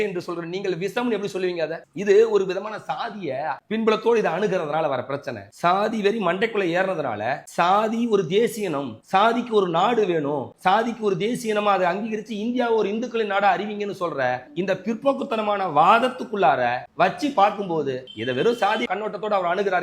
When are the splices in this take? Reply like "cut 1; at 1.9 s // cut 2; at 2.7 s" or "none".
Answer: cut 1; at 3.6 s // cut 2; at 18.9 s